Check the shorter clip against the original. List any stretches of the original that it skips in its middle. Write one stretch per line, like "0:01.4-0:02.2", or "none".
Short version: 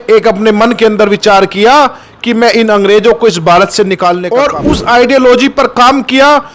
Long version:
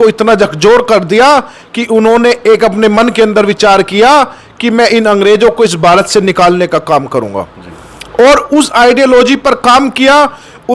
0:06.6-0:08.1

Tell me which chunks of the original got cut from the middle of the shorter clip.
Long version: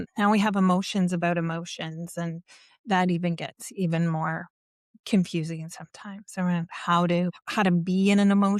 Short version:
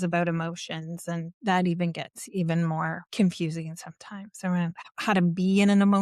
0:02.4-0:02.7
0:04.4-0:04.9
0:06.8-0:07.4

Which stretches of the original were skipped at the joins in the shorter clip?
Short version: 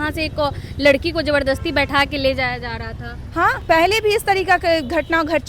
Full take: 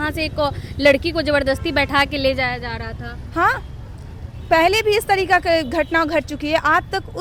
0:03.6-0:04.4

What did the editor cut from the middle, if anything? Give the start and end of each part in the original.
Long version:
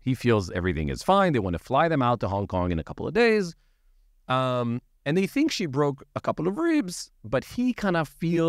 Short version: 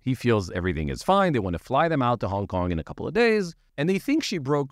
0:03.6-0:04.9

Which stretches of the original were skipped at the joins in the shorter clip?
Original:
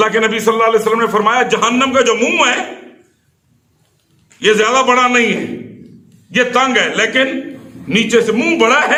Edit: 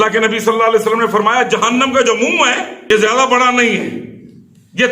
0:02.7-0:04.3

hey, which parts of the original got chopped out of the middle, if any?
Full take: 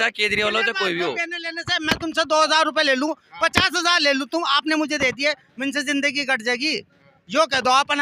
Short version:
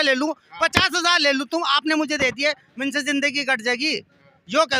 none

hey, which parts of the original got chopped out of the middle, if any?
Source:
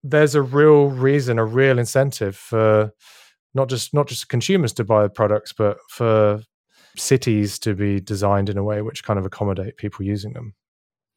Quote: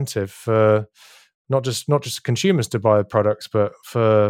none

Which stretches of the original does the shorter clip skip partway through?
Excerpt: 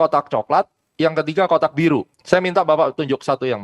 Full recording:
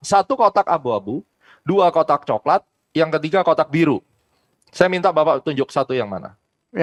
0:04.1-0:04.6

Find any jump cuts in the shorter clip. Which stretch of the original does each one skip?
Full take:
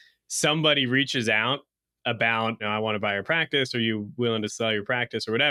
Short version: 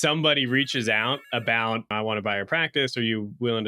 0:02.2-0:02.6

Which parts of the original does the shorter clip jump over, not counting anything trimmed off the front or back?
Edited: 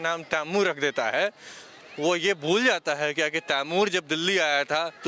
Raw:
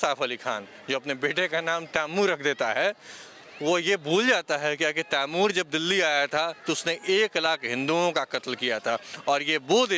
none

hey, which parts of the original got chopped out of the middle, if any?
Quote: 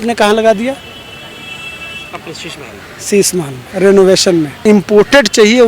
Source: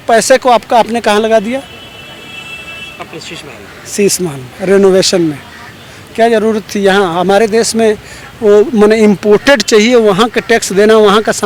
0:05.5-0:09.0

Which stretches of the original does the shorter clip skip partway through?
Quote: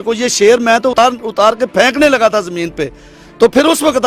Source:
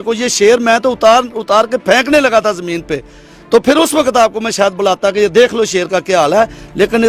0:01.0-0:01.1

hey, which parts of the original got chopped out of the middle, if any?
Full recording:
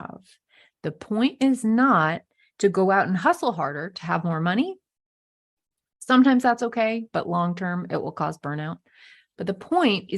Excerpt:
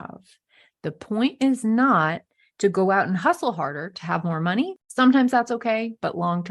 0:04.8-0:05.9

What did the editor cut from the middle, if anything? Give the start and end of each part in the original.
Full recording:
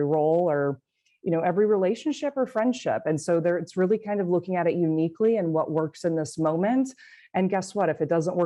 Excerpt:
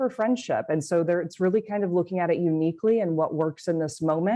none

